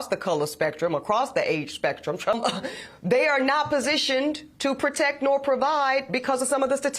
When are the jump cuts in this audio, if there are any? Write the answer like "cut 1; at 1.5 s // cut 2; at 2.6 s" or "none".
cut 1; at 2.3 s